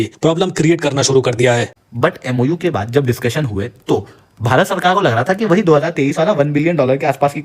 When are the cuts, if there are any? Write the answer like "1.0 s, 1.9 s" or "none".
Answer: 1.7 s